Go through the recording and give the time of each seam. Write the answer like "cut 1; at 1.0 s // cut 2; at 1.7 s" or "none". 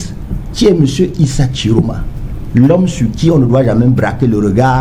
none